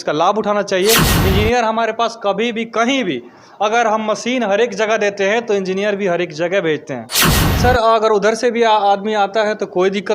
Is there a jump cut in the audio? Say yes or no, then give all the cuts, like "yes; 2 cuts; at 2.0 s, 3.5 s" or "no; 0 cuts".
yes; 2 cuts; at 1.1 s, 7.4 s